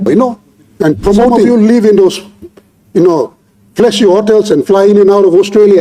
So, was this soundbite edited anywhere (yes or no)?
yes